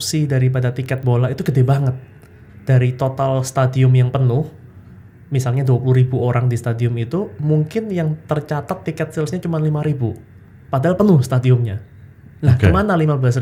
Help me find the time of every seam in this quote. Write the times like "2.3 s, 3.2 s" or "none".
none